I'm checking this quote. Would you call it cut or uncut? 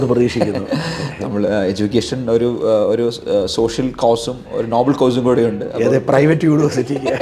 uncut